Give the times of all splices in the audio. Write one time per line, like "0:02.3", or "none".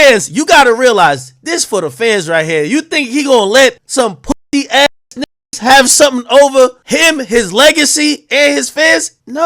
none